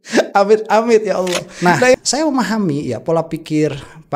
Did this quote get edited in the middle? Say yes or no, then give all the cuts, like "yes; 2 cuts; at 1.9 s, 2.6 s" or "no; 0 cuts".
yes; 1 cut; at 2.0 s